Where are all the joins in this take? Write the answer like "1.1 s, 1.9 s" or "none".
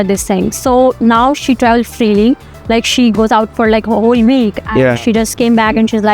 3.1 s